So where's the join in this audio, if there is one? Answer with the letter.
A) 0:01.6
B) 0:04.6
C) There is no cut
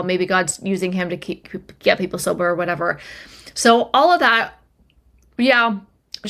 C